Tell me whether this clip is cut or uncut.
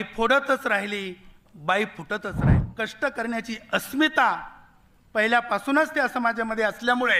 cut